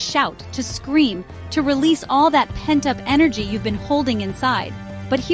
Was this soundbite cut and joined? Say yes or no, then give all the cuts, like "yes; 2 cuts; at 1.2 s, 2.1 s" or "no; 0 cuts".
no; 0 cuts